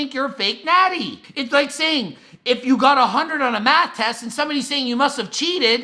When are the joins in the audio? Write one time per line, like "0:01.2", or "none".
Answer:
0:01.2